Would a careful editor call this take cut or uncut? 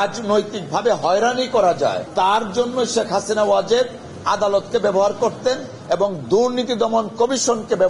cut